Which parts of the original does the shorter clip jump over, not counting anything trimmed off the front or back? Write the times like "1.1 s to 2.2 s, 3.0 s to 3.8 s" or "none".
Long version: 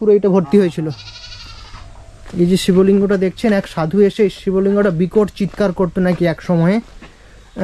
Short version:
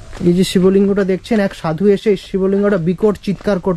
none